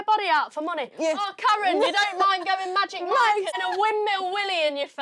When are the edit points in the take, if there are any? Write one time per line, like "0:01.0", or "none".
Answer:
0:03.6

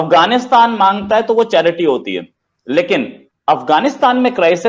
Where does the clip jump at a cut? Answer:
0:03.2

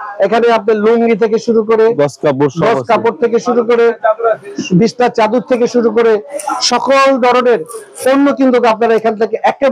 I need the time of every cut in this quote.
none

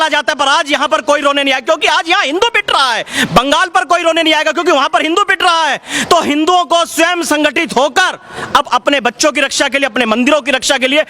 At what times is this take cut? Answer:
none

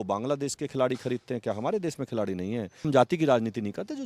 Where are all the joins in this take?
0:02.8

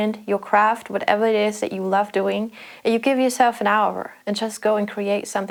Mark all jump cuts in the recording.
none

